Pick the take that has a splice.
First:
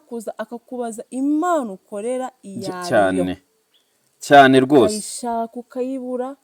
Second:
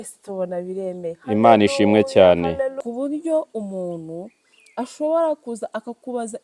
second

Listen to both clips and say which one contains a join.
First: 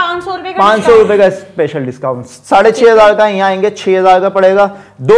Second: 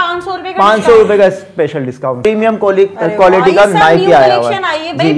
second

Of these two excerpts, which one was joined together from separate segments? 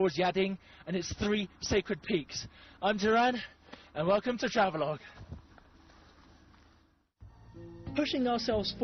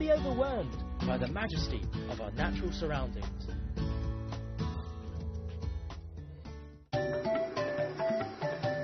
second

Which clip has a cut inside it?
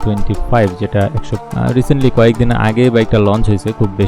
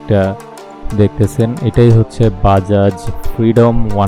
first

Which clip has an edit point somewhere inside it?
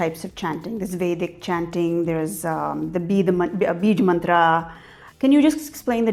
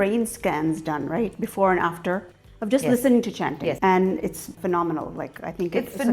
second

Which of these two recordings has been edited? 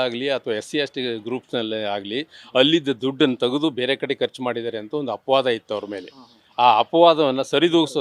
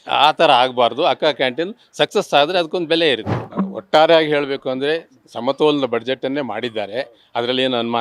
second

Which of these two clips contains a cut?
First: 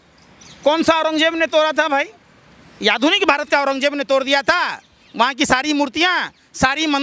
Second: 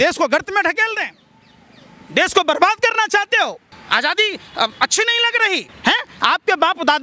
second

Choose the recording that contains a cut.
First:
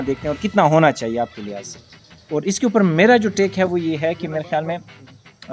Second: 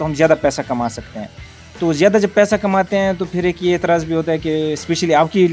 first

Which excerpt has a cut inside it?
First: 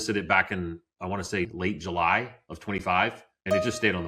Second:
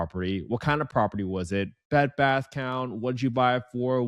first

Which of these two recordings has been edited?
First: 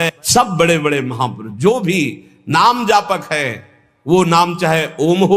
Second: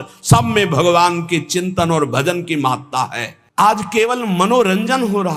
second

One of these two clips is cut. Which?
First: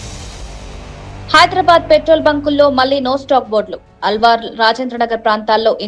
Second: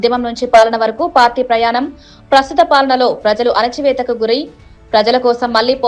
first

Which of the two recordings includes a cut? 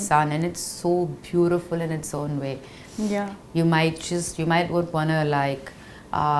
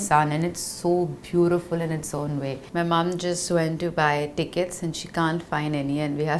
second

